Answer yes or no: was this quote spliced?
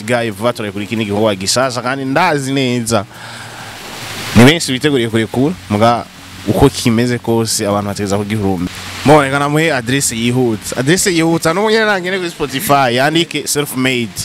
yes